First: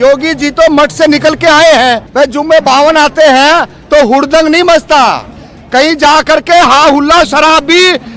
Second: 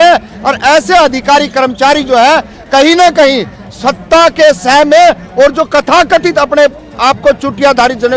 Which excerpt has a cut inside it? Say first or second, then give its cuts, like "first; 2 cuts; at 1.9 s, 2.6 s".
first; 1 cut; at 2.1 s